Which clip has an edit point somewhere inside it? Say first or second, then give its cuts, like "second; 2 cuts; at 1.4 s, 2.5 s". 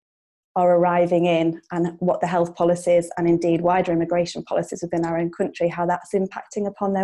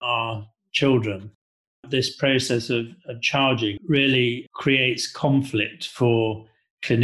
second; 2 cuts; at 1.4 s, 3.8 s